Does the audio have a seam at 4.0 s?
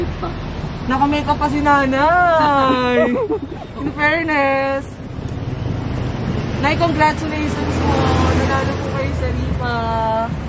no; 0 cuts

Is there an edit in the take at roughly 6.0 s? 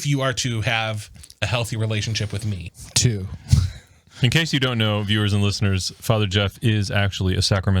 no; 1 cut; at 2.7 s

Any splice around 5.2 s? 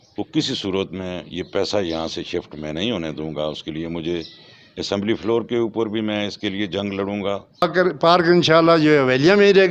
no; 1 cut; at 7.6 s

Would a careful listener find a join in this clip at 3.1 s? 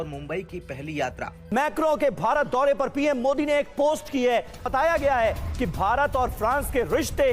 no; 2 cuts; at 1.4 s, 4.6 s

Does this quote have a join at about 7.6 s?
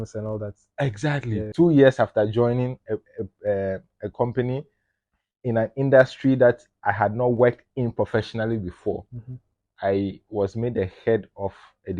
no; 1 cut; at 1.5 s

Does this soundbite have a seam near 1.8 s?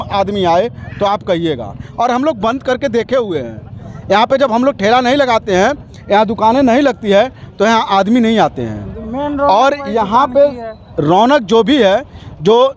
no; 0 cuts

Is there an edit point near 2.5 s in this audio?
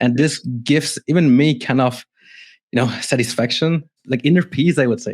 no; 1 cut; at 3.9 s

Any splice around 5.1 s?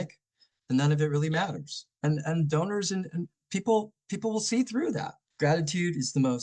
yes; 1 cut; at 5.1 s

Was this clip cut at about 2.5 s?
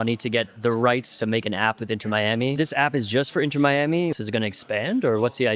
yes; 2 cuts; at 2.5 s, 4.2 s

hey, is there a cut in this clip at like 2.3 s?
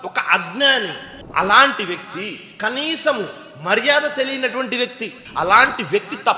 no; 1 cut; at 5.2 s

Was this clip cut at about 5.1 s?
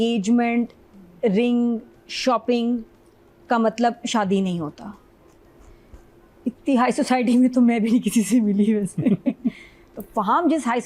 no; 0 cuts

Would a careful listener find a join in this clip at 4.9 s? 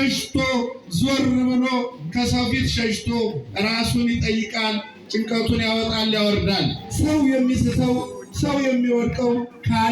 no; 1 cut; at 6.8 s

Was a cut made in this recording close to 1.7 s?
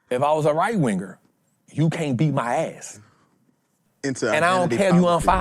no; 1 cut; at 3.8 s

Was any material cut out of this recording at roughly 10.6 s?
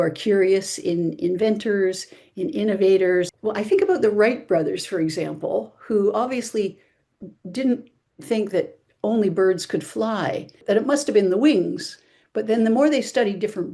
yes; 2 cuts; at 3.3 s, 10.6 s

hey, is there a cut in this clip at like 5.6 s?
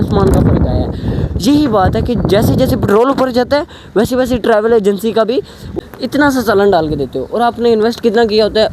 yes; 1 cut; at 5.6 s

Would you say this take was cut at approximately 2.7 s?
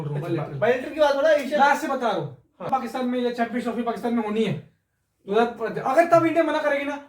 yes; 1 cut; at 2.7 s

